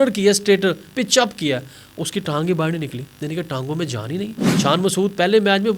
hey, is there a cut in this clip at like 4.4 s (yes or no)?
yes